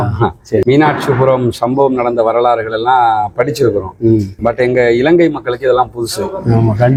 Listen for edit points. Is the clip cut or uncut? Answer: uncut